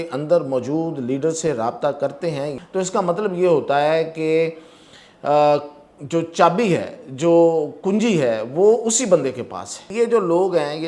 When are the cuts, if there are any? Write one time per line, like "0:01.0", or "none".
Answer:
0:02.5
0:09.9